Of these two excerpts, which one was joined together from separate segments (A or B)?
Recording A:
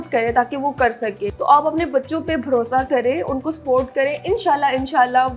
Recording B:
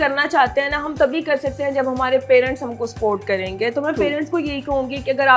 A